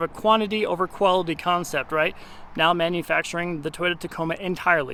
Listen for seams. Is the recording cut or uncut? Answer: uncut